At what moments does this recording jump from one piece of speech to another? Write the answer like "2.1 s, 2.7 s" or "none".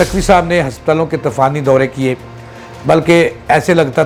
none